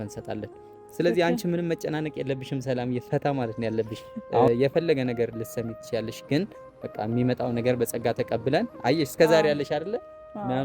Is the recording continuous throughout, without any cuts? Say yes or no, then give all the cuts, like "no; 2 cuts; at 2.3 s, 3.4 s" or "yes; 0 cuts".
no; 1 cut; at 4.5 s